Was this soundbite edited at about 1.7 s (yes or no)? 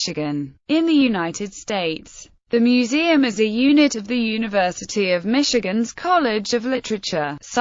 no